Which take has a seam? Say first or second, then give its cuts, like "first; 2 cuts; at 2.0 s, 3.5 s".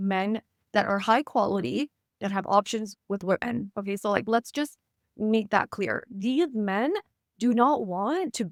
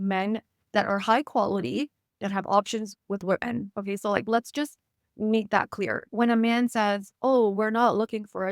second; 1 cut; at 6.1 s